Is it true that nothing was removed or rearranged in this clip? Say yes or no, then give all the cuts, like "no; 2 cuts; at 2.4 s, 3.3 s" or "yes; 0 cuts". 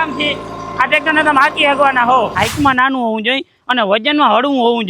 no; 1 cut; at 2.3 s